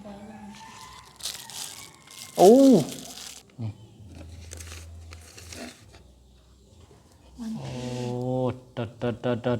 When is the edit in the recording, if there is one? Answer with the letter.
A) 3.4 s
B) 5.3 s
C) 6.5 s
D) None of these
A